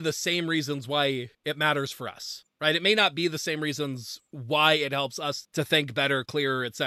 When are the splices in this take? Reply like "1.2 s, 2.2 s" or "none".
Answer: none